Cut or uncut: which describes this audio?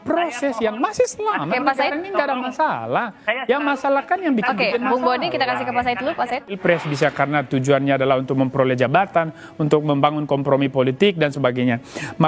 cut